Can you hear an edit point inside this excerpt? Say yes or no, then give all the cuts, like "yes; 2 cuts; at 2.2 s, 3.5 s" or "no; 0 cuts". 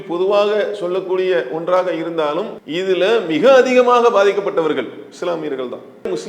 yes; 1 cut; at 2.6 s